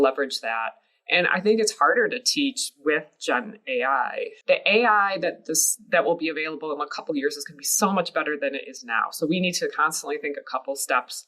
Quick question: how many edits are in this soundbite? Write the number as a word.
one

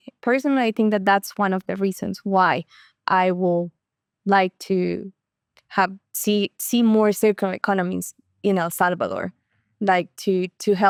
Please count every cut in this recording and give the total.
zero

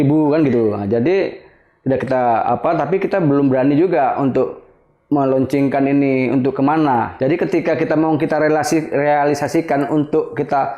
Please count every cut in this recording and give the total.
one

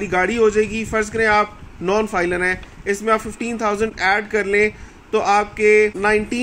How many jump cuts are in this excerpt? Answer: zero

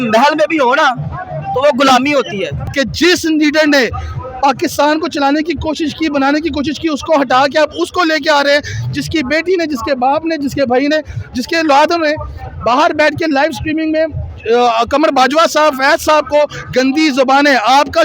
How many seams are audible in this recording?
one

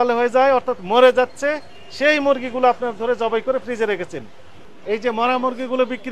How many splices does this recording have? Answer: one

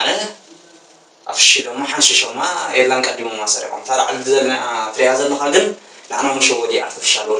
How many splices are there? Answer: zero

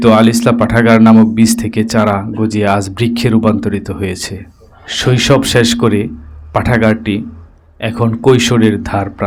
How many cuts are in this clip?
zero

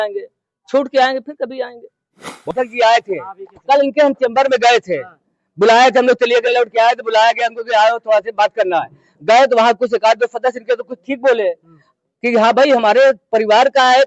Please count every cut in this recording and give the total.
one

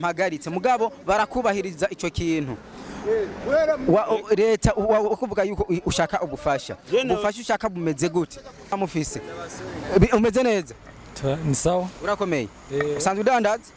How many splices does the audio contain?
one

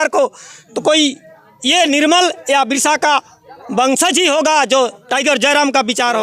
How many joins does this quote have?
zero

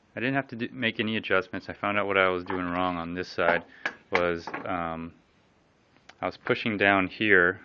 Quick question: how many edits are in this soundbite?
one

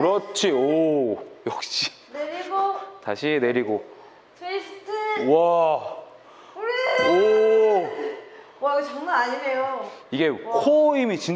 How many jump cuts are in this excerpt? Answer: zero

